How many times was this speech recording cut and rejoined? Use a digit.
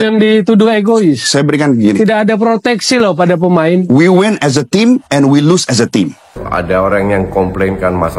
1